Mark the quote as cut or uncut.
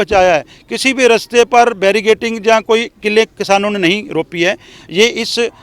uncut